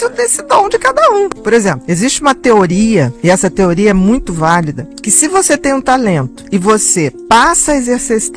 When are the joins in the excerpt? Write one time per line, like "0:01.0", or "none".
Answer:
none